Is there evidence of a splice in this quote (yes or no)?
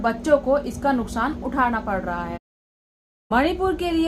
yes